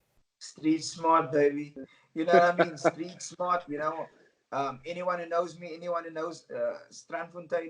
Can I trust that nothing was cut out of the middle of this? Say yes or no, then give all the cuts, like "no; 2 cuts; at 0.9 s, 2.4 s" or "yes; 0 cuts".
yes; 0 cuts